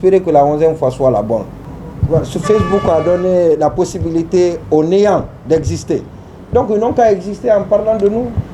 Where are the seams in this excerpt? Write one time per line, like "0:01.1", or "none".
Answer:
0:01.5